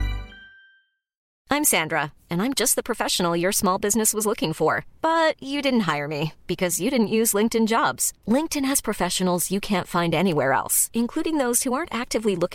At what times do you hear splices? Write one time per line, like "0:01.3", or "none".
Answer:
0:01.3